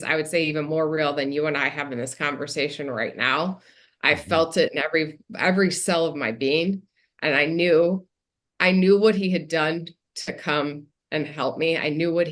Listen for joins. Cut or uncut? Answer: uncut